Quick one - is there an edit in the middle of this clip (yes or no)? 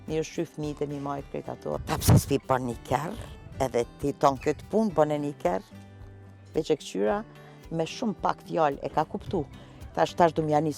yes